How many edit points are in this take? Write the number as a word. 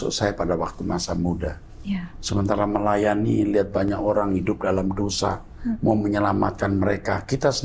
zero